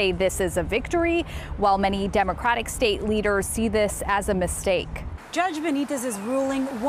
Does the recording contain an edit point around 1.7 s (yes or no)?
no